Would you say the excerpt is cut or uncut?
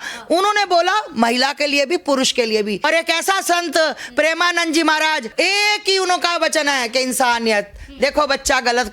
cut